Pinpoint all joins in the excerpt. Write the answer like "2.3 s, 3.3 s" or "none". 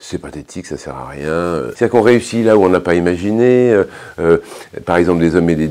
1.7 s